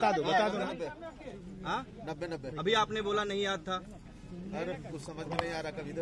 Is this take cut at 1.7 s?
no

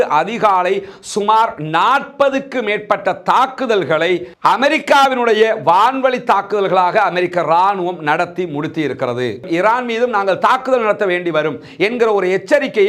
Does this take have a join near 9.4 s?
yes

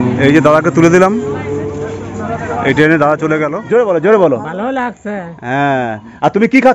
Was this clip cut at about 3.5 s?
yes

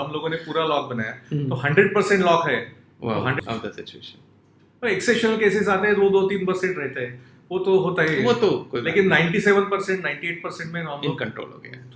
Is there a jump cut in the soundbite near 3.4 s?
yes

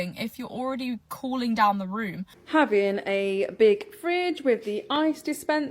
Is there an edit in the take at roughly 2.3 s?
yes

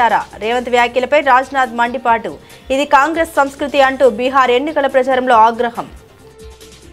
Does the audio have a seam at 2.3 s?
no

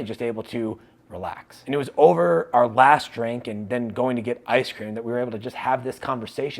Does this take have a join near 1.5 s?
yes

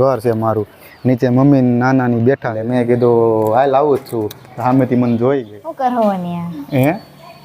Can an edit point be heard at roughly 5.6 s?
yes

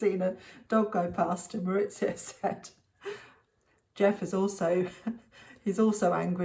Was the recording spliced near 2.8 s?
no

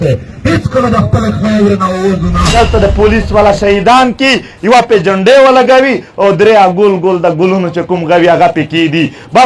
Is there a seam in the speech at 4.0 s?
no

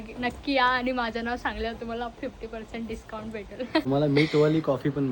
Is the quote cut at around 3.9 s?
yes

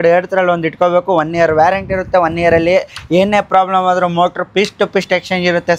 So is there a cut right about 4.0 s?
no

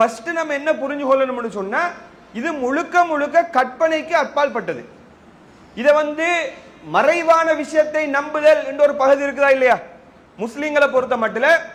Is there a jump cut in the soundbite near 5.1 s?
no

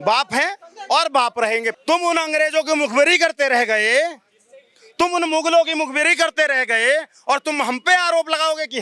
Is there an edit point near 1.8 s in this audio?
yes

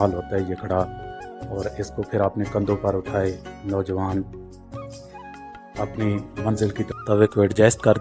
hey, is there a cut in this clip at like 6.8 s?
yes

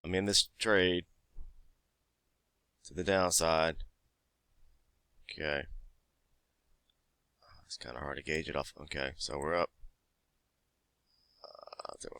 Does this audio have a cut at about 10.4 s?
no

